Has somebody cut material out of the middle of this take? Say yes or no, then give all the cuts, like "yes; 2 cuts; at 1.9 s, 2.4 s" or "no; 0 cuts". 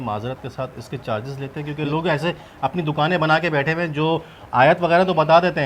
no; 0 cuts